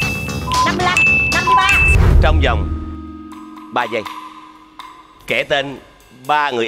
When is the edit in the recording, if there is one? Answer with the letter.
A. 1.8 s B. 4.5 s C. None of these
A